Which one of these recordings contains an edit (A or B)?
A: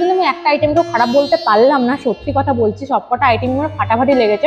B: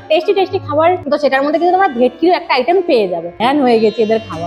B